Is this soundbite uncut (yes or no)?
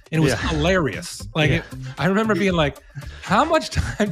yes